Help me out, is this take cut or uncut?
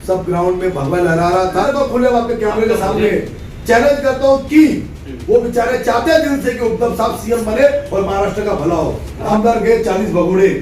cut